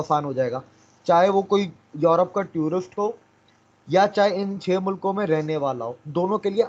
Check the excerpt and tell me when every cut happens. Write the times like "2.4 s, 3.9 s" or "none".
none

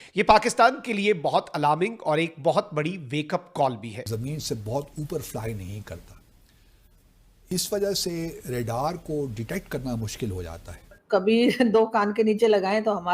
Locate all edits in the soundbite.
4.0 s, 11.0 s

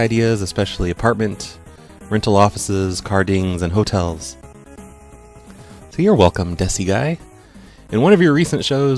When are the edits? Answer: 6.7 s

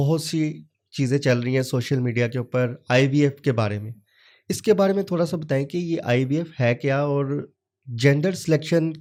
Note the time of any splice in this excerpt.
none

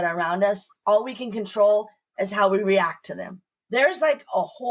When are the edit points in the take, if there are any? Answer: 3.5 s

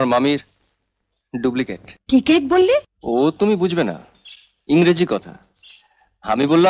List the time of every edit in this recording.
1.9 s, 2.9 s

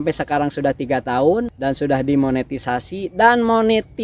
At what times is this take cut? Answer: 1.5 s

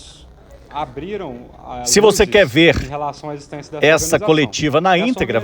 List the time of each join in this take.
1.9 s

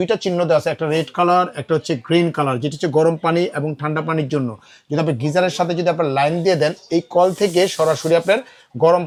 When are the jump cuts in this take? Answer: none

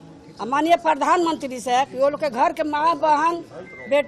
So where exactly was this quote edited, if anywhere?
none

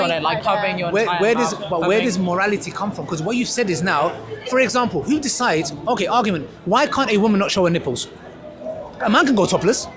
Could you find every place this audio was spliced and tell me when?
none

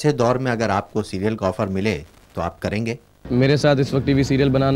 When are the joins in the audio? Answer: 3.3 s

